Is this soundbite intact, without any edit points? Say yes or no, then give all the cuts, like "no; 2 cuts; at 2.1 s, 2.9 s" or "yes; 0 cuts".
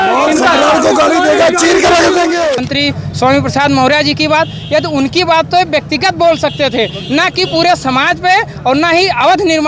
no; 1 cut; at 2.6 s